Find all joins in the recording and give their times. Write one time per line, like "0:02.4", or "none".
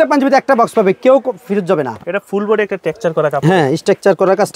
0:02.1

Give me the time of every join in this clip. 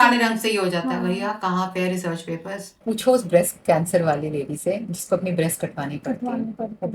0:02.7

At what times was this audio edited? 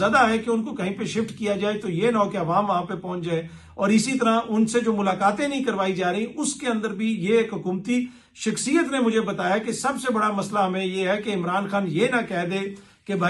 none

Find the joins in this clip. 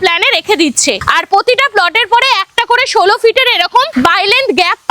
0:01.0

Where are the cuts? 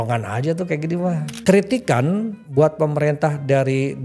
0:01.3
0:02.4

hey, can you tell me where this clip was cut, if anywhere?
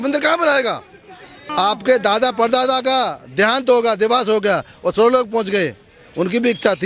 0:01.4

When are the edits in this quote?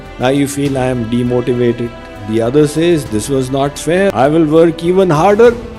0:04.1

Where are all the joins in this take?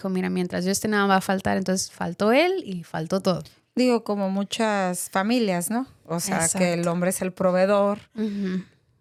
none

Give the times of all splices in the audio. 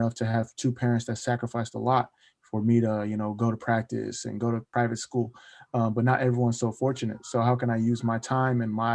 0:04.7

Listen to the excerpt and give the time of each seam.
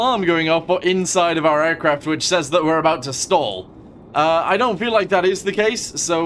none

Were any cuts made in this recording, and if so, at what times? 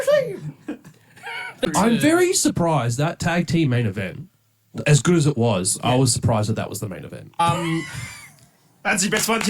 0:01.7
0:07.4

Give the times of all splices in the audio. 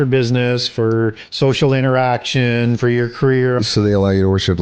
0:01.2
0:03.6

